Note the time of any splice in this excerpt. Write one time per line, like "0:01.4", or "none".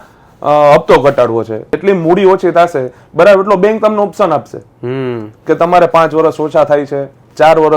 0:01.7